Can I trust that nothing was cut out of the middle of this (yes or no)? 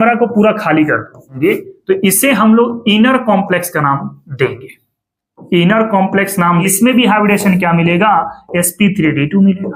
no